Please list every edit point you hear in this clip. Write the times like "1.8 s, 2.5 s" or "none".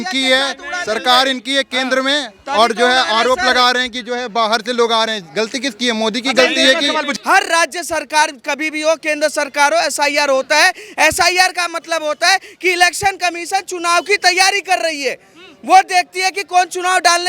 7.1 s